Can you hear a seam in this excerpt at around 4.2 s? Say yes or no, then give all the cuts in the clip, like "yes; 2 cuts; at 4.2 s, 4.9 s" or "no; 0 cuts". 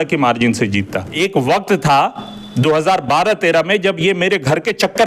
no; 1 cut; at 1.1 s